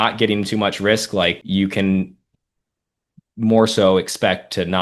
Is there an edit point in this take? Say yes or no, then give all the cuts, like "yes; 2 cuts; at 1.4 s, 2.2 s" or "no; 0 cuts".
yes; 1 cut; at 1.4 s